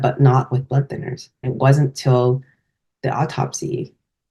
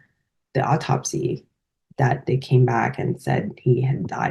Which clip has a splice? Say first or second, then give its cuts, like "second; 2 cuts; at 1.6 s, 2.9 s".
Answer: first; 1 cut; at 1.5 s